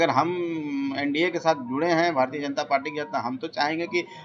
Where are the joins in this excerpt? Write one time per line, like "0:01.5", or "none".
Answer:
none